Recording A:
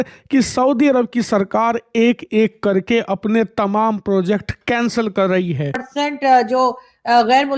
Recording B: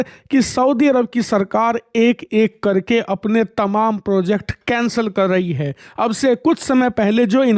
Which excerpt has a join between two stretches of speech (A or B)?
A